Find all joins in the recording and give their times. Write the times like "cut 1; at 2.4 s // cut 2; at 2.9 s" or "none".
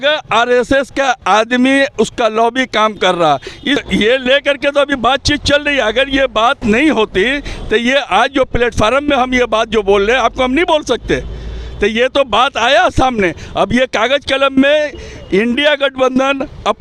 cut 1; at 3.8 s